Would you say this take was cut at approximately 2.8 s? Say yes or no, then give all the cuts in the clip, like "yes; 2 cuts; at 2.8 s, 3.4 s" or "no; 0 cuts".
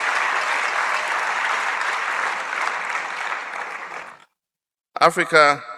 no; 1 cut; at 4.1 s